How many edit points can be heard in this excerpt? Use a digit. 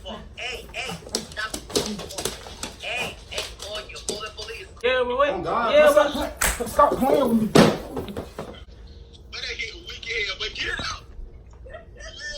2